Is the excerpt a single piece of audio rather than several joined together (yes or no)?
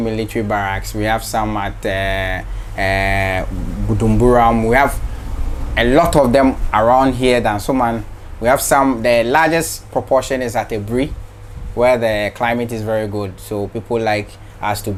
yes